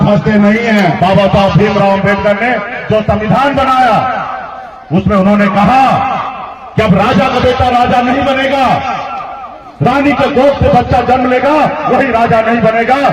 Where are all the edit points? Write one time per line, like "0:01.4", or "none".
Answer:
0:01.0